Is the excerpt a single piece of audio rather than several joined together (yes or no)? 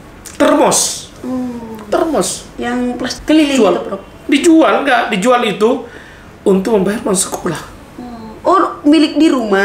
no